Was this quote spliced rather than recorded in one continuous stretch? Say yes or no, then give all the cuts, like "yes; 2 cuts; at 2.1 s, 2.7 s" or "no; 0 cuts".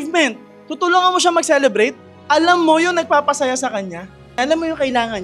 yes; 2 cuts; at 2.1 s, 4.3 s